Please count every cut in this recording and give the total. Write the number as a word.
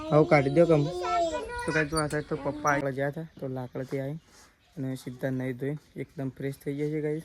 one